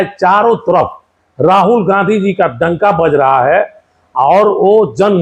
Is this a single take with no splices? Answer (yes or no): yes